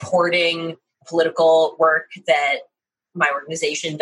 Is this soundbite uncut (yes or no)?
no